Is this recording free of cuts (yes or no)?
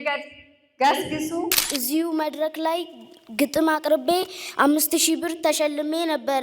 no